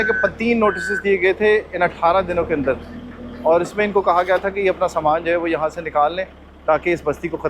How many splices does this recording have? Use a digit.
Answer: 0